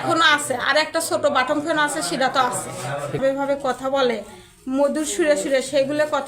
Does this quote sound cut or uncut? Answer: cut